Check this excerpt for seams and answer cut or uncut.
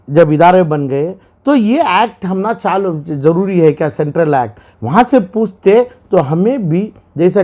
uncut